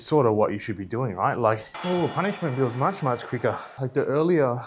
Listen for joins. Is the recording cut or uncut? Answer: cut